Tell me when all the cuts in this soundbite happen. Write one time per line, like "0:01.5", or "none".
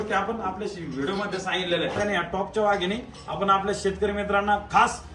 0:02.0